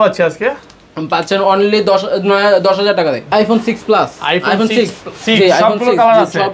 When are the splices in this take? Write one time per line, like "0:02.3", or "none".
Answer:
0:03.3